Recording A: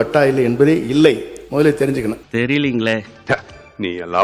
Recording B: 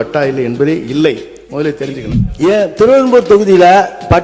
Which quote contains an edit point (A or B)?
B